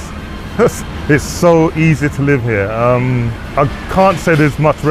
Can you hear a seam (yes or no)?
yes